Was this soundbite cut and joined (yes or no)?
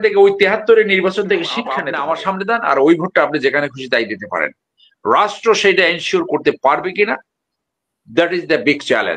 yes